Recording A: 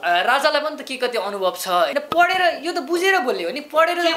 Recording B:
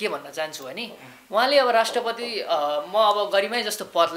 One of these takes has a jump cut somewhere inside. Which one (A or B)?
A